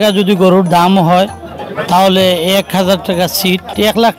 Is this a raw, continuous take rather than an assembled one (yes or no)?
yes